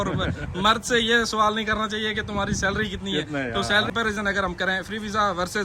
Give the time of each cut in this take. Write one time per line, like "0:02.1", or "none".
0:03.9

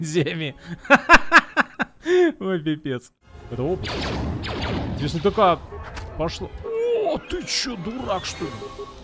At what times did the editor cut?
0:03.1

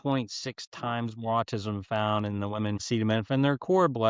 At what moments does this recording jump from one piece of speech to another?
0:02.8

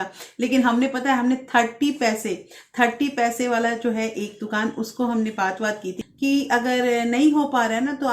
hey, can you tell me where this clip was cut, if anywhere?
0:06.0

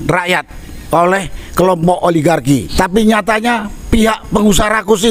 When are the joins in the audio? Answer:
0:02.7

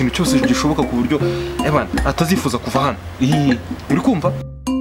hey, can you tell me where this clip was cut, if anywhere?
none

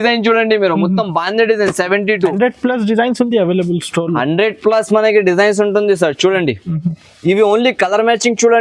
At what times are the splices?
0:02.3

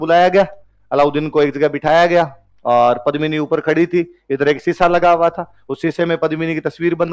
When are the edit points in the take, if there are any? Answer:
none

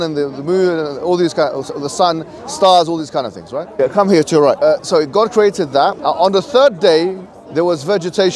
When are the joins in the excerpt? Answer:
0:03.6
0:04.7
0:06.0

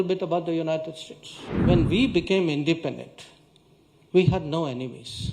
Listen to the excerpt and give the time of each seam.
0:01.6

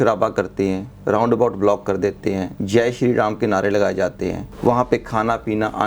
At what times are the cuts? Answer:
0:04.5

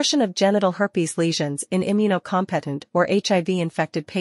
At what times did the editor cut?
0:01.4

